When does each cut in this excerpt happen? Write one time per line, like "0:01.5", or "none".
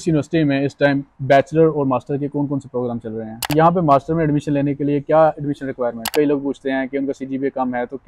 0:03.5
0:06.1